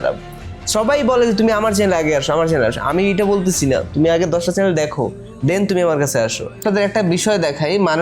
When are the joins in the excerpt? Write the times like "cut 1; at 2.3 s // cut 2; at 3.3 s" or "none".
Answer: cut 1; at 6.6 s